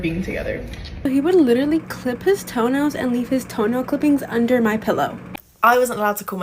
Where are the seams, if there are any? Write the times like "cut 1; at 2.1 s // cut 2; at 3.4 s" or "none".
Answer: cut 1; at 1.1 s // cut 2; at 5.2 s